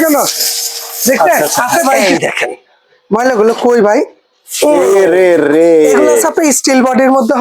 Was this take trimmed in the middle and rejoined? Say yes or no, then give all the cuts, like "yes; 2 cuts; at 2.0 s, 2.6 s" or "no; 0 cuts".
yes; 2 cuts; at 2.0 s, 6.3 s